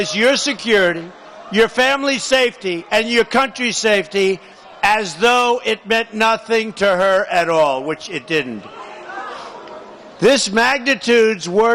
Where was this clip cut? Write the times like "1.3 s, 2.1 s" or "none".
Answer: 10.1 s